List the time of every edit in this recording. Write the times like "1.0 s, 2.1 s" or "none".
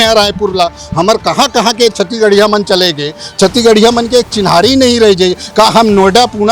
none